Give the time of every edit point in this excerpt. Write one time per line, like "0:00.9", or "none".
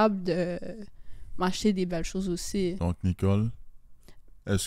0:02.8